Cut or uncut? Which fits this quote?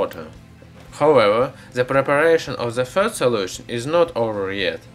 uncut